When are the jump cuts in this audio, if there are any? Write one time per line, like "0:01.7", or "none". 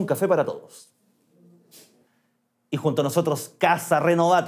0:02.0